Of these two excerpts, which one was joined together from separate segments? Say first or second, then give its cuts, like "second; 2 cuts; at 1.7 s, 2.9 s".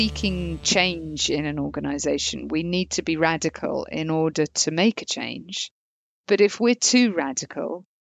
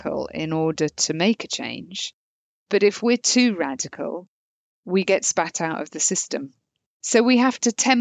second; 1 cut; at 6.8 s